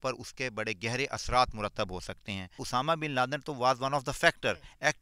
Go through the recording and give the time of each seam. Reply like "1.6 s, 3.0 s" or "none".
2.5 s